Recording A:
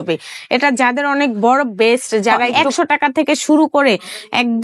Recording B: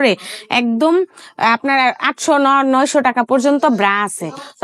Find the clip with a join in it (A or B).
A